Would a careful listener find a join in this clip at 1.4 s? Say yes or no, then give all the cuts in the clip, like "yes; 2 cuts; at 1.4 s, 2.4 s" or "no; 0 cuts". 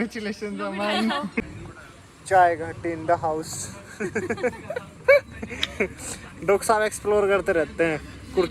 yes; 1 cut; at 1.4 s